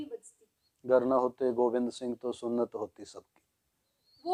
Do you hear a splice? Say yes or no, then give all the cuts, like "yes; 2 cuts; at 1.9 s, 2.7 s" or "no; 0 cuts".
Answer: no; 0 cuts